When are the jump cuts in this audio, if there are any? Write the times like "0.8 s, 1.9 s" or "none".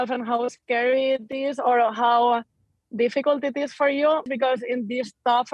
4.3 s